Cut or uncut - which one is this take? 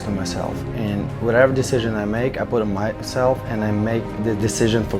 uncut